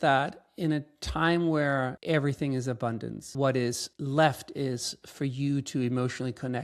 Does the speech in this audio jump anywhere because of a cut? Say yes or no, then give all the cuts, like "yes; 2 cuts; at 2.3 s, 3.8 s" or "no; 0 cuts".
yes; 3 cuts; at 2.0 s, 3.2 s, 3.9 s